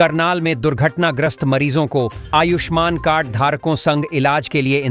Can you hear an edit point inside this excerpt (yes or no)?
no